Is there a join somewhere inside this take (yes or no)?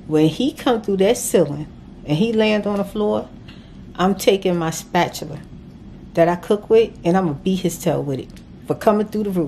no